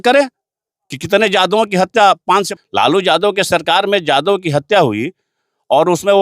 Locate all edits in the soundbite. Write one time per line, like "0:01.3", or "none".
0:02.5